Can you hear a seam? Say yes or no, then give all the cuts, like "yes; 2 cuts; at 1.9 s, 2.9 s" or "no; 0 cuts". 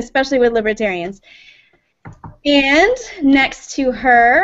yes; 1 cut; at 3.0 s